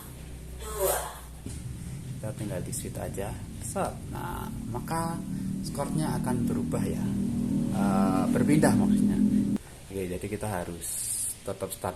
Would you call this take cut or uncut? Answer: cut